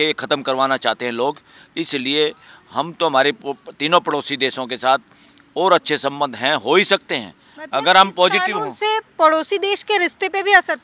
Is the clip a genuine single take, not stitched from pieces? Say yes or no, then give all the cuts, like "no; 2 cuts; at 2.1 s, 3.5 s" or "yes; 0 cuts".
yes; 0 cuts